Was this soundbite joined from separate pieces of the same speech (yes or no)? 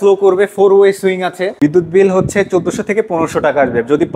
yes